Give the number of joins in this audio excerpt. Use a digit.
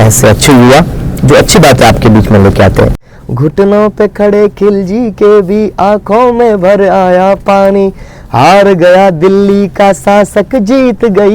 1